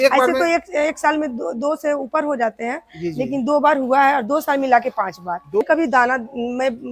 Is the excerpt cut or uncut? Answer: cut